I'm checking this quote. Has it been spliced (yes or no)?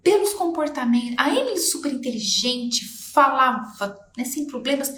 no